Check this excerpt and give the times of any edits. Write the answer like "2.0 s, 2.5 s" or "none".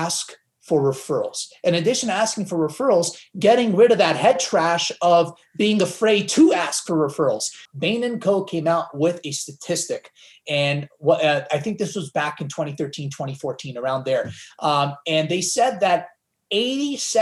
7.6 s